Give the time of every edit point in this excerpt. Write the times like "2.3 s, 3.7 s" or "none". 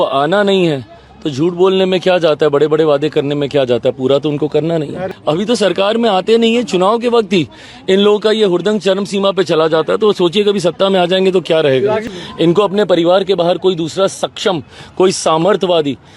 5.0 s, 12.1 s